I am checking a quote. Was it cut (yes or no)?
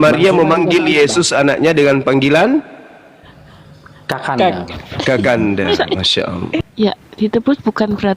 yes